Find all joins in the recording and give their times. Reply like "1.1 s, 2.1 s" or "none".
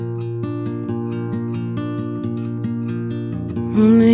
none